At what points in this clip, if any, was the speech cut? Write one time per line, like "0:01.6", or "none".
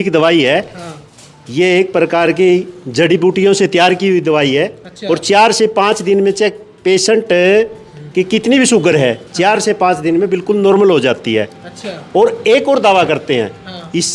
none